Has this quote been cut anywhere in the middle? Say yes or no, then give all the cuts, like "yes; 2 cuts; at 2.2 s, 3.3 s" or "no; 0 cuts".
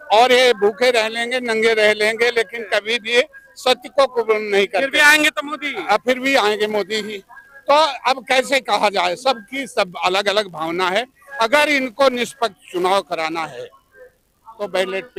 no; 0 cuts